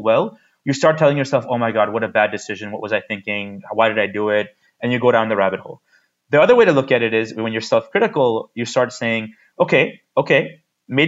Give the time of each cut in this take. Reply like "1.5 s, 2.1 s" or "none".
none